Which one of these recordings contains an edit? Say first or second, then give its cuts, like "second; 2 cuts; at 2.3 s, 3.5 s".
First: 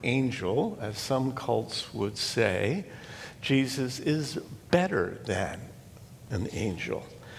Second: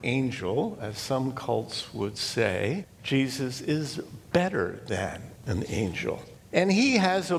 second; 3 cuts; at 2.9 s, 5.3 s, 6.3 s